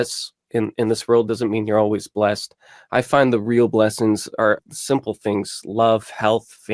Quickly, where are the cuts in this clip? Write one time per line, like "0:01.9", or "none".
0:04.6